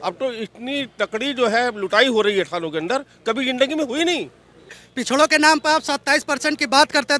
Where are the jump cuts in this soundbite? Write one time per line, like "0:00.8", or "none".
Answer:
0:04.9